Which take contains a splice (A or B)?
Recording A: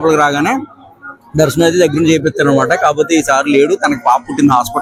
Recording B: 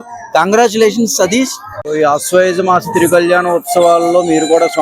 B